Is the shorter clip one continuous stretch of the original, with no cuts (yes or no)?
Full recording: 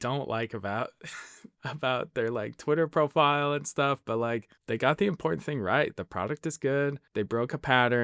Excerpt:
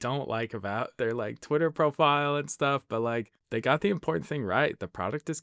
no